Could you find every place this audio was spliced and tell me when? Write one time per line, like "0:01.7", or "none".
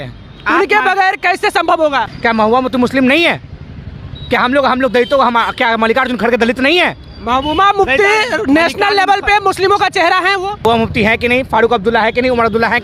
0:02.1
0:10.6

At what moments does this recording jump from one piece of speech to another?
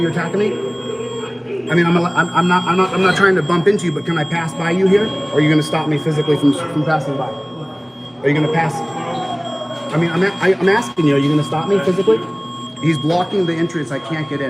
none

